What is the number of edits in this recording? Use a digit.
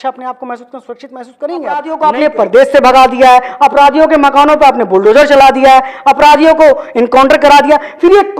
1